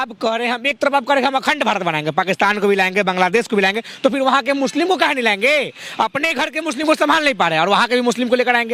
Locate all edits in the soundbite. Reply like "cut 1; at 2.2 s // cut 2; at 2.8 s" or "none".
none